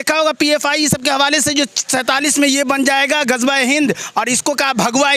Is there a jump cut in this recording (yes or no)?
no